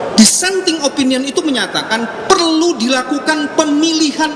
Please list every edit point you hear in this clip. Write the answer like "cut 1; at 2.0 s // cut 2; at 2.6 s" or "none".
none